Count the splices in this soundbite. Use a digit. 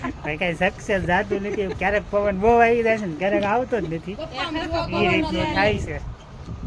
0